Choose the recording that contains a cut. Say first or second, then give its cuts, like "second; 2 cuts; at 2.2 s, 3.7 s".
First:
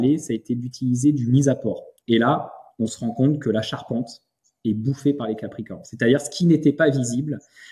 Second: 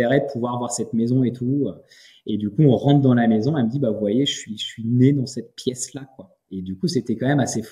first; 1 cut; at 1.9 s